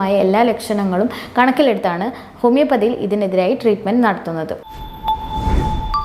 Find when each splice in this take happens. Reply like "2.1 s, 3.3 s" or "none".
4.6 s

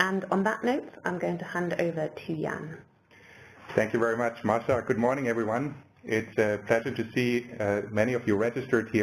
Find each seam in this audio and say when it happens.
2.3 s

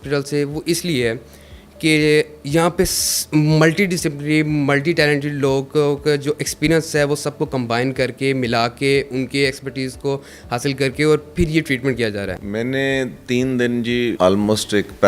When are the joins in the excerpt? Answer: 12.3 s, 14.1 s

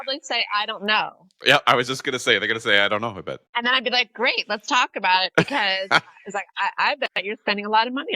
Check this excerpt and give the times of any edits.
3.4 s

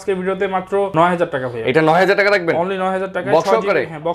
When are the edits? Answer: 0.9 s

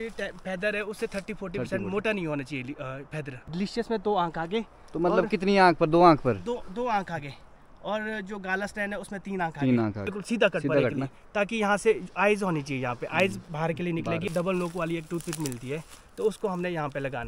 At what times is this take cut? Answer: 3.5 s, 10.1 s, 14.3 s

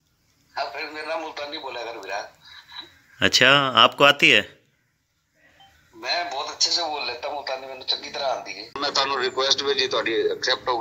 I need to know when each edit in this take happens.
8.8 s

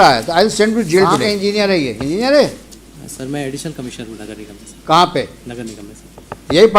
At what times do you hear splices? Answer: 1.2 s

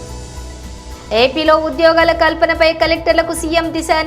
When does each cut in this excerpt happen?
none

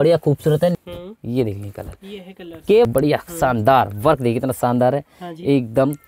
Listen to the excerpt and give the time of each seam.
0.8 s, 2.9 s

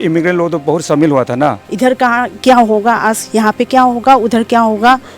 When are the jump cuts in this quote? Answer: 1.7 s

